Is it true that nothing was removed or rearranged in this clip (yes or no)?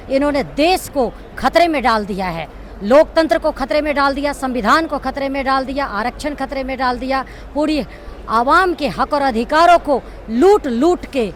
yes